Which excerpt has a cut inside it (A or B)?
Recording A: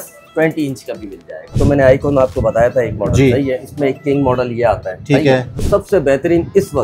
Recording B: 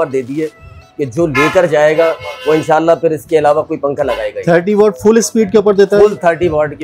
A